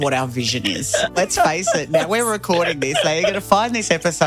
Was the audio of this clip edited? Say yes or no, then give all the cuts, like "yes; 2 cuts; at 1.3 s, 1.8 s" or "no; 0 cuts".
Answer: yes; 1 cut; at 1.2 s